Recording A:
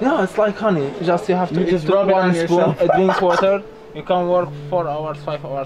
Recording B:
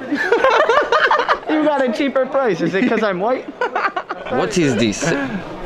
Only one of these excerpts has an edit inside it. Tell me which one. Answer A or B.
B